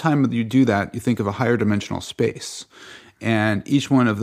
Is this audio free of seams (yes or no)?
yes